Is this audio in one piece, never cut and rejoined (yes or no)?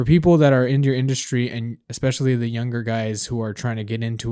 yes